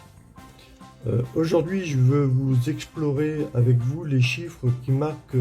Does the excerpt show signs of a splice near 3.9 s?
no; 1 cut; at 1.0 s

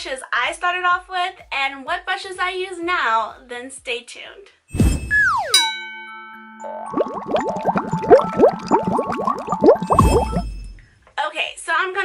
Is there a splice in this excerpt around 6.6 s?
yes; 1 cut; at 6.6 s

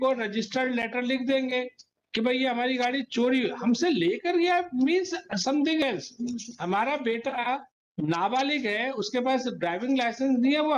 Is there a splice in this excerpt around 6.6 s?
no; 0 cuts

